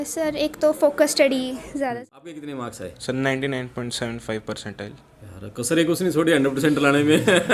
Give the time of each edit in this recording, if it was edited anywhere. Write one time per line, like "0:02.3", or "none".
0:01.9